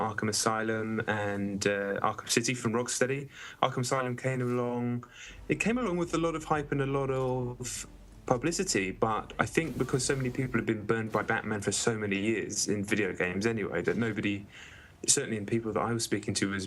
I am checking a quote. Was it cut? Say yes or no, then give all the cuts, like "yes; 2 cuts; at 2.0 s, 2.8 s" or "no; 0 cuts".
no; 0 cuts